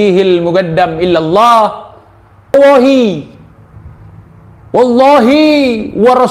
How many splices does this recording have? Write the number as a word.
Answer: one